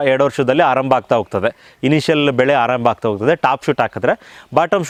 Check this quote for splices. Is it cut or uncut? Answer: uncut